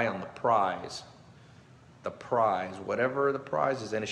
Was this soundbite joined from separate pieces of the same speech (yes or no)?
no